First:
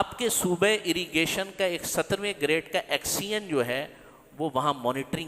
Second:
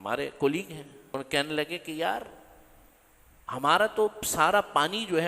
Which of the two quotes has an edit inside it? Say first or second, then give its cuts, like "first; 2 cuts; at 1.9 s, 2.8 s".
second; 1 cut; at 1.1 s